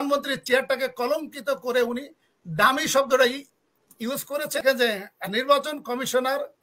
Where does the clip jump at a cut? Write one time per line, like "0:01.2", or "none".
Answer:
0:04.6